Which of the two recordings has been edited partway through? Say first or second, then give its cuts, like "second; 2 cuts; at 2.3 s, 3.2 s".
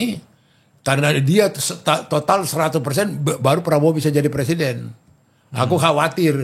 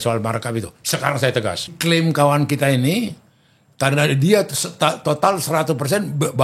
second; 1 cut; at 1.8 s